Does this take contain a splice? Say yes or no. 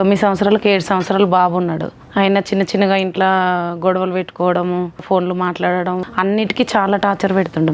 yes